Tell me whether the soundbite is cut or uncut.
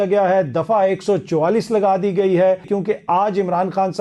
cut